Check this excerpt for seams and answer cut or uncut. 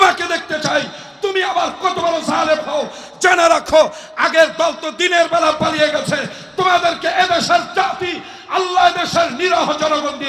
uncut